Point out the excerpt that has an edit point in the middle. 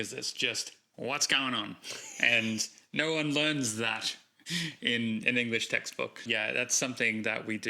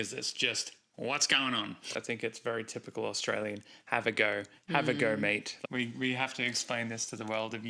second; 2 cuts; at 2.0 s, 5.5 s

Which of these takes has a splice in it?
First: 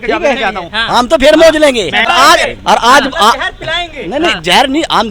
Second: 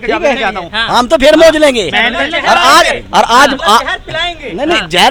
first; 1 cut; at 2.1 s

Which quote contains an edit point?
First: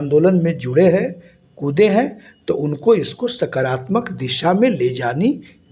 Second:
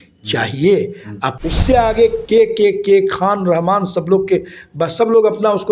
second; 1 cut; at 1.2 s

